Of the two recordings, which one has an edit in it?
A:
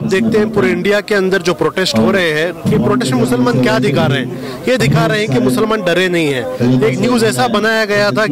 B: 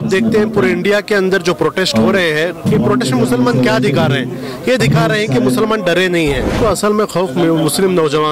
B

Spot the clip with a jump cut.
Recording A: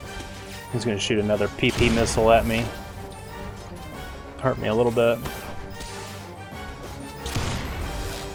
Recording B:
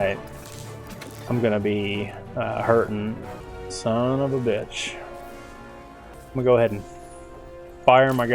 B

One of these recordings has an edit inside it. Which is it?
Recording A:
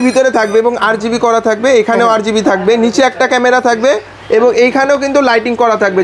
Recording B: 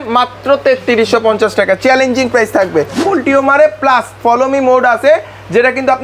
B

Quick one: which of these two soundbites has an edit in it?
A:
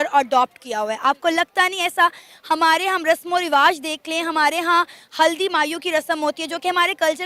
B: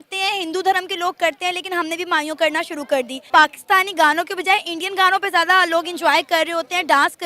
B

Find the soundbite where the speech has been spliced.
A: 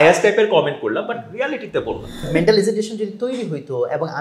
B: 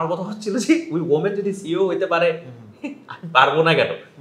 A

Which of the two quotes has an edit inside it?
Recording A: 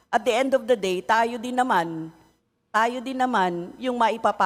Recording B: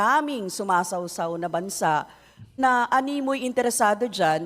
B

